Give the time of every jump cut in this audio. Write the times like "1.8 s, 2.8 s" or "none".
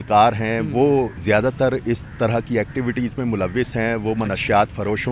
1.2 s